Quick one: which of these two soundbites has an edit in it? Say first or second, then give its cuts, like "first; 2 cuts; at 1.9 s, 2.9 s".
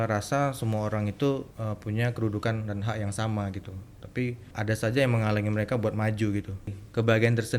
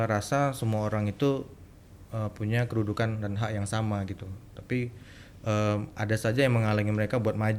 first; 3 cuts; at 1.5 s, 4.5 s, 6.7 s